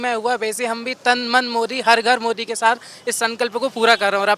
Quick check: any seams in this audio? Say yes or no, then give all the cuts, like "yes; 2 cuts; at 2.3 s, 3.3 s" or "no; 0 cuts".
no; 0 cuts